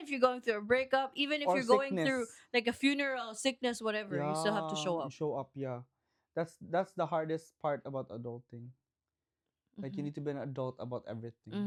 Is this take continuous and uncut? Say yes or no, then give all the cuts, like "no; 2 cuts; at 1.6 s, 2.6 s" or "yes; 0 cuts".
yes; 0 cuts